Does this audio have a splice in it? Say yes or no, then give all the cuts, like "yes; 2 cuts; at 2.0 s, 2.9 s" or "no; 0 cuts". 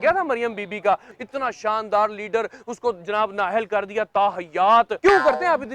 yes; 2 cuts; at 1.1 s, 4.9 s